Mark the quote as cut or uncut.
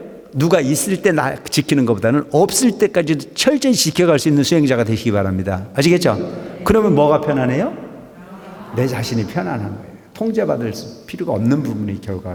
uncut